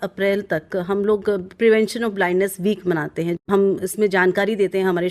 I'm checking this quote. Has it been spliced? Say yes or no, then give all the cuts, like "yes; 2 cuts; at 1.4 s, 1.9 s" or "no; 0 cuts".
yes; 1 cut; at 3.4 s